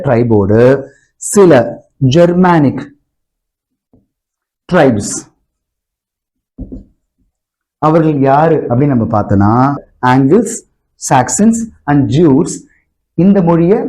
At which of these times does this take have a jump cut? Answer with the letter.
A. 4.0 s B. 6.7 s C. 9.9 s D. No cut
C